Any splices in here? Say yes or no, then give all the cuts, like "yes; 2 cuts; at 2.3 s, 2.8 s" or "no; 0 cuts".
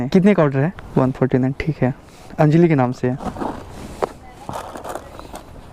no; 0 cuts